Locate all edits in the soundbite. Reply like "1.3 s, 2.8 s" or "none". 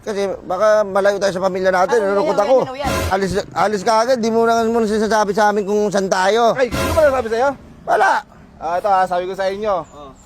3.1 s